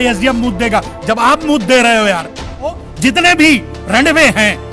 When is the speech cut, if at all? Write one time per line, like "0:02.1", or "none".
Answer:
0:02.9